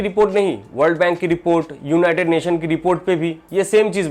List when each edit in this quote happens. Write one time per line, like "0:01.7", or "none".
none